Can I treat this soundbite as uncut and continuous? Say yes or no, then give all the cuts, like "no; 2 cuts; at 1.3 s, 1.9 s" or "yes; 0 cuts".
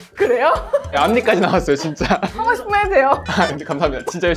yes; 0 cuts